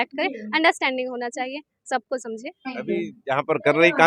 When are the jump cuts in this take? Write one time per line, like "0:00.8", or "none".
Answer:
none

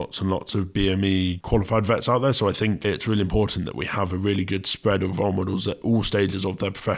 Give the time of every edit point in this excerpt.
0:01.4
0:02.8

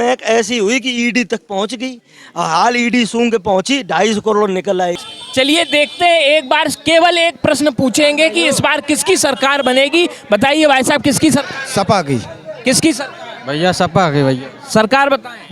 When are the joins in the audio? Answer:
0:05.1

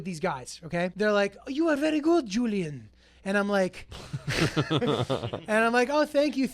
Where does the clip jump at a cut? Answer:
0:00.9

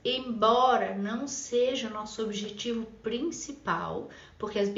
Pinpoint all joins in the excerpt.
none

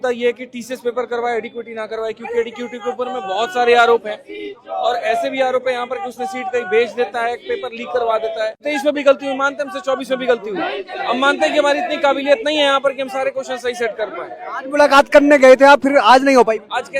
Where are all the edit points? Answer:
0:08.6

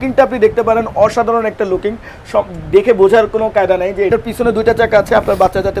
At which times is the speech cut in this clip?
0:04.1

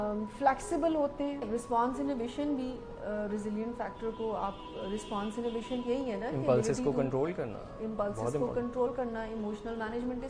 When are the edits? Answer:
0:01.4

